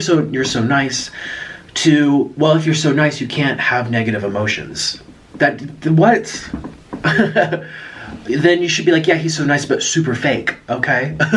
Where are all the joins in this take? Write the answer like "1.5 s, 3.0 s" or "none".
none